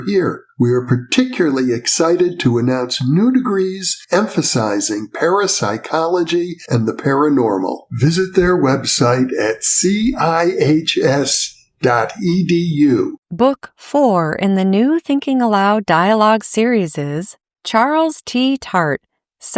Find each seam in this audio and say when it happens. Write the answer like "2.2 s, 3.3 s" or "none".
13.2 s